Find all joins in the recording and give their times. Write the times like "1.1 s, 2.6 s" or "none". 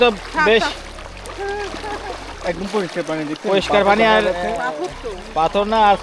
none